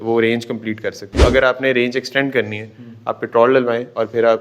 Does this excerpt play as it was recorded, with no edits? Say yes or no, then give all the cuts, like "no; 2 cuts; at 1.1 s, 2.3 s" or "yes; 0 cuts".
no; 1 cut; at 1.2 s